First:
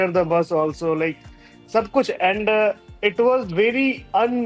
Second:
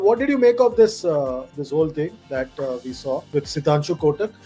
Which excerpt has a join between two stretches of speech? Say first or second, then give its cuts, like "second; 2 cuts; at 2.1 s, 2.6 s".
second; 1 cut; at 3.3 s